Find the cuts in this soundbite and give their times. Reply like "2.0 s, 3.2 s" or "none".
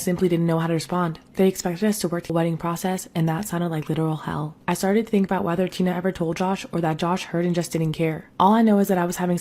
2.3 s